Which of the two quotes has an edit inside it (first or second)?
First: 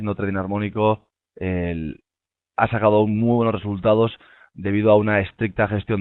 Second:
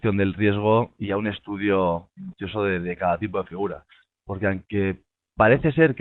second